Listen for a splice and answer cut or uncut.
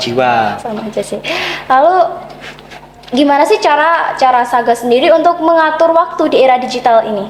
uncut